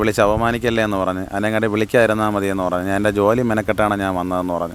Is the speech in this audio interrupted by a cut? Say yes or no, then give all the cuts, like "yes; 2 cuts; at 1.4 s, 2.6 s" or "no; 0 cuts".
no; 0 cuts